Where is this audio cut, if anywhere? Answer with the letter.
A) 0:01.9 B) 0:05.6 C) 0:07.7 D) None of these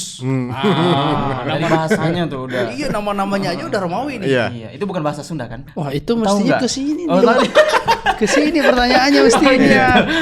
B